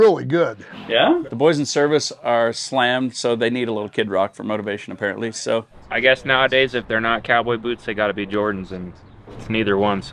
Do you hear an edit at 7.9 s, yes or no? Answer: no